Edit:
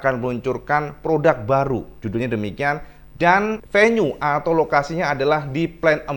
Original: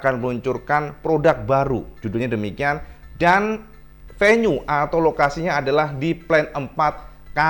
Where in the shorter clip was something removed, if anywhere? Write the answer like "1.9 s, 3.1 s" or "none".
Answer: 3.6 s